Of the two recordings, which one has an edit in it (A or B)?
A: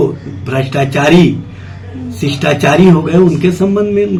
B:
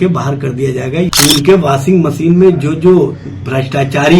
B